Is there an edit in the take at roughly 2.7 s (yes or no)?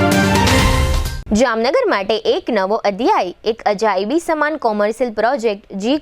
no